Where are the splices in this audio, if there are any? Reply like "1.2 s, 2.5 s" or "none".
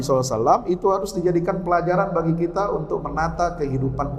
none